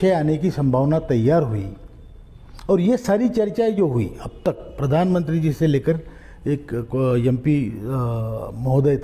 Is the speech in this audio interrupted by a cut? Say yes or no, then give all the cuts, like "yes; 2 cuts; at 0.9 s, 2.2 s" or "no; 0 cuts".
no; 0 cuts